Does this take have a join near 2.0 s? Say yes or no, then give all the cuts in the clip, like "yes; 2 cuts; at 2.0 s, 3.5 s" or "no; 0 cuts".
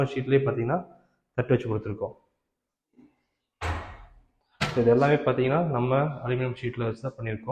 no; 0 cuts